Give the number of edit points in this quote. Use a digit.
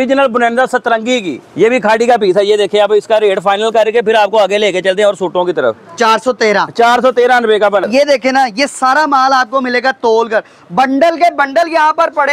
2